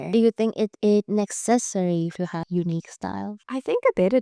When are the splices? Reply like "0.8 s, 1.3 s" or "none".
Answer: 2.2 s